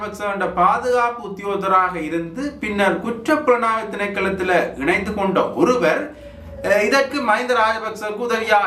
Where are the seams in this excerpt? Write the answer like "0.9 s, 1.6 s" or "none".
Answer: none